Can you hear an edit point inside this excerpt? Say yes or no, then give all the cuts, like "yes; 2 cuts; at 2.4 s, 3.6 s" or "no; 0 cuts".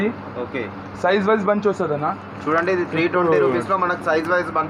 no; 0 cuts